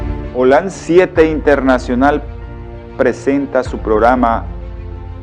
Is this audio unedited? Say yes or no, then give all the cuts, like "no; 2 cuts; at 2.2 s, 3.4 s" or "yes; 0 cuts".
no; 1 cut; at 3.2 s